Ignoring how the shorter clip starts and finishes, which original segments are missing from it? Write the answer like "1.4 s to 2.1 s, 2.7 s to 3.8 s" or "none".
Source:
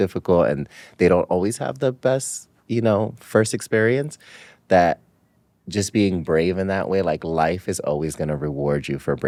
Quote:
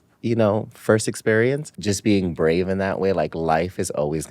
4.2 s to 5.6 s